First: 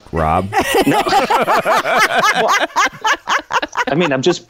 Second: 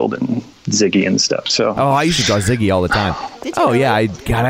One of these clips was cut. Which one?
second; 1 cut; at 3.3 s

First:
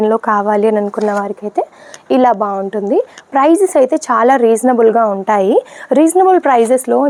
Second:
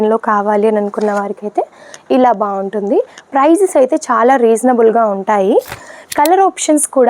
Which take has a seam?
second; 1 cut; at 5.8 s

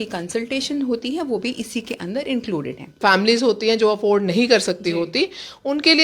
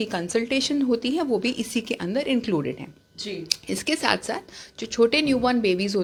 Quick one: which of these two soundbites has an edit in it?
first; 1 cut; at 2.9 s

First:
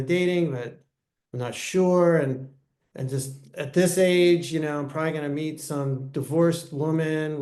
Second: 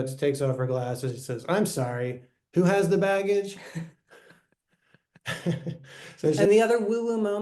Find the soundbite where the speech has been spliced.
second; 1 cut; at 6.4 s

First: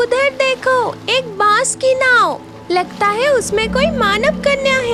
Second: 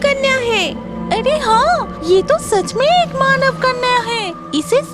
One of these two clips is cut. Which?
second; 1 cut; at 1.9 s

